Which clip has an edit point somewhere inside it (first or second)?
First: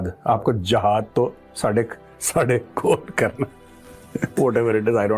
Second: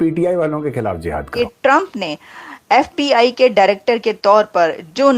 second